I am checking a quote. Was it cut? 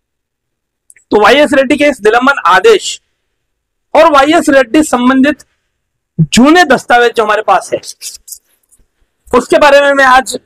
no; 0 cuts

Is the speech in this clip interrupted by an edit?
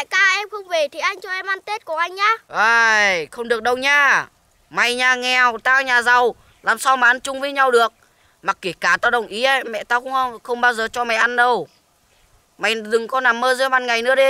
no; 0 cuts

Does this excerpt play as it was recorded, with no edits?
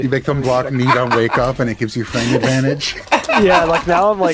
yes; 0 cuts

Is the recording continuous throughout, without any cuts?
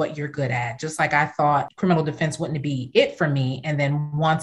no; 1 cut; at 1.7 s

